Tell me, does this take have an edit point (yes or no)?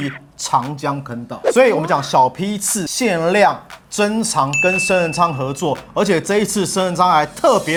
no